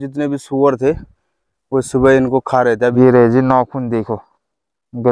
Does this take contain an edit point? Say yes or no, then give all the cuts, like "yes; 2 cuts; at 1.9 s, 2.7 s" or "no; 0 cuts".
yes; 1 cut; at 2.9 s